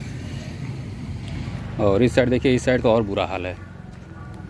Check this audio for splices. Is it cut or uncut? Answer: cut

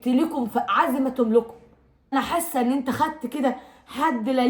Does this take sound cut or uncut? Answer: cut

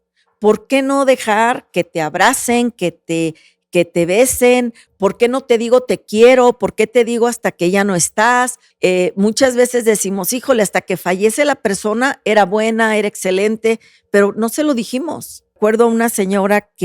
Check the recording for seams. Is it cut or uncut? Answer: cut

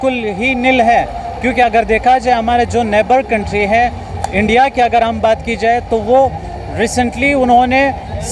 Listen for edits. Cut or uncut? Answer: uncut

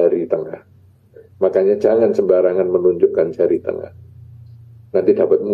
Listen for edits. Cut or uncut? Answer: uncut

